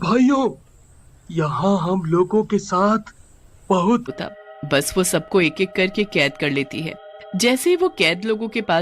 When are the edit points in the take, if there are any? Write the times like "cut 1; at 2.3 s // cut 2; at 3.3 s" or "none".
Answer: cut 1; at 4.1 s